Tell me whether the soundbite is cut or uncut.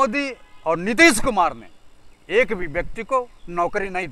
uncut